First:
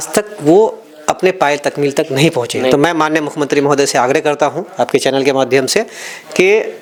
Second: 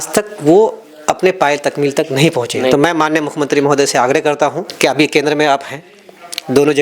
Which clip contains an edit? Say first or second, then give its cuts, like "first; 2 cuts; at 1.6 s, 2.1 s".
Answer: second; 1 cut; at 4.6 s